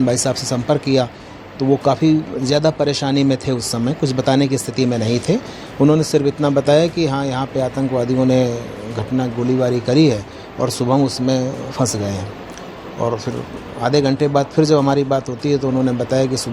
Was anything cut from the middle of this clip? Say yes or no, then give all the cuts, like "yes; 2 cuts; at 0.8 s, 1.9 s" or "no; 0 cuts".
no; 0 cuts